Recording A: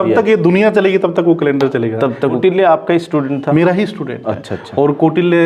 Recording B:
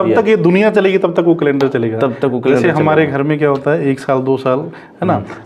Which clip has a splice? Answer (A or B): A